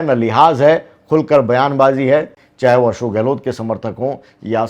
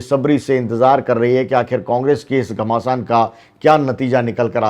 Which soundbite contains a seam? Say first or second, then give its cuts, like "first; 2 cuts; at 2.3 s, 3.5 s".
first; 1 cut; at 2.4 s